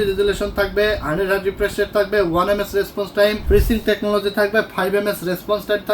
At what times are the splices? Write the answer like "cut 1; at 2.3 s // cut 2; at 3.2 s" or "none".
cut 1; at 3.4 s